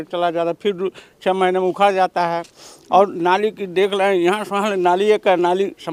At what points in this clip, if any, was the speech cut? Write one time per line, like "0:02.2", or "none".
none